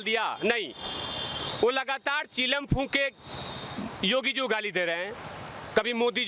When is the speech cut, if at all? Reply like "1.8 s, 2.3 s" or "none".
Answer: none

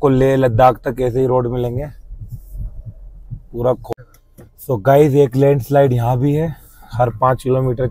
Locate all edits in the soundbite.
3.8 s

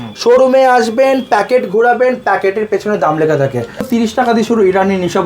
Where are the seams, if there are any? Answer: 3.8 s

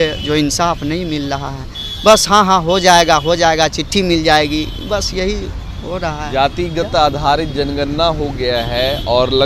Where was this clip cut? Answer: none

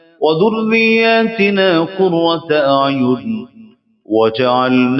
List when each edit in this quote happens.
none

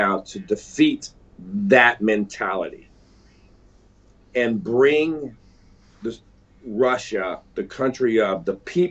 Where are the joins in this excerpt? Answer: none

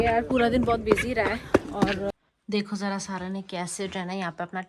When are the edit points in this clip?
2.1 s

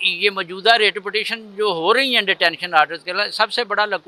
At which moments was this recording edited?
none

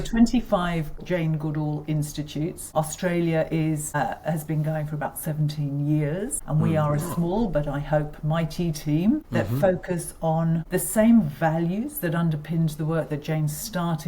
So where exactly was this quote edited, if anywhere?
1.0 s, 2.6 s, 4.0 s, 6.4 s, 9.3 s, 10.6 s

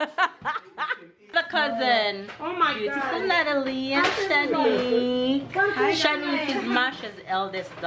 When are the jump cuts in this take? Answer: 1.3 s

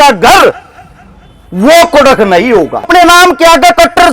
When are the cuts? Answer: 2.9 s

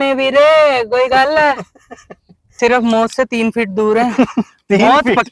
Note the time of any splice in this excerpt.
2.5 s

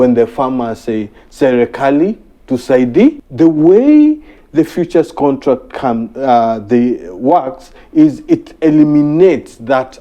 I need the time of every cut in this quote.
3.2 s

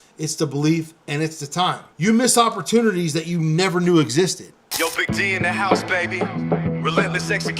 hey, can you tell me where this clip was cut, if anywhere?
1.9 s, 4.6 s

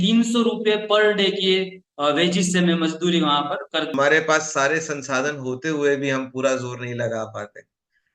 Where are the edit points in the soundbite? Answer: 3.9 s

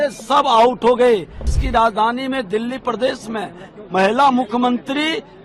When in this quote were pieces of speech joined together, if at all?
1.6 s

